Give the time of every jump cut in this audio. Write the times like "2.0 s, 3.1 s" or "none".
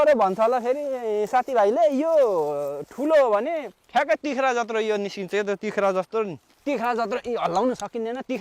3.7 s, 6.5 s